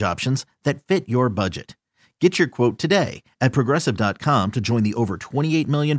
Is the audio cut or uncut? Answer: uncut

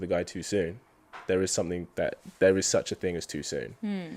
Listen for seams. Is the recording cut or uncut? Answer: uncut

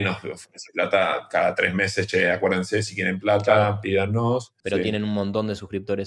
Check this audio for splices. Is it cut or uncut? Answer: cut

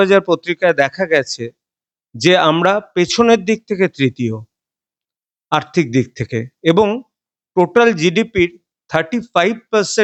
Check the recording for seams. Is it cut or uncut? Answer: uncut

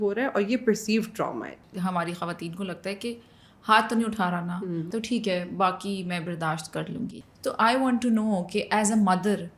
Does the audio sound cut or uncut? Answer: cut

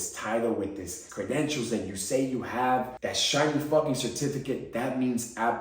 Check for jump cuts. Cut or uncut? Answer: cut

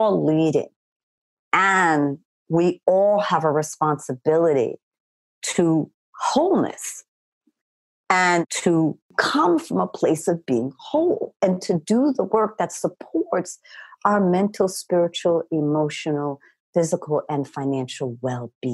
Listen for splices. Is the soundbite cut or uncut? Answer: cut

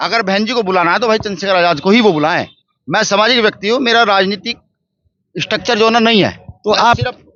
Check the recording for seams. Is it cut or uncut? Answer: uncut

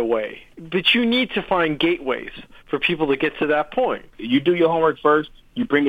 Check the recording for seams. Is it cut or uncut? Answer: cut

